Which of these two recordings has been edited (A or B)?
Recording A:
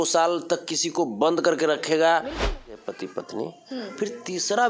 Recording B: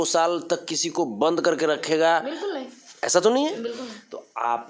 A